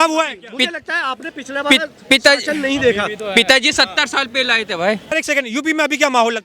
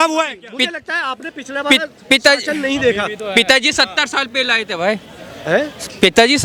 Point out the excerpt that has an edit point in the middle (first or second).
first